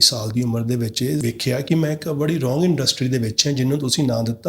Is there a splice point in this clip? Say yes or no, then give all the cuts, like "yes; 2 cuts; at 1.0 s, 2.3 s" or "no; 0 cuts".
yes; 1 cut; at 1.2 s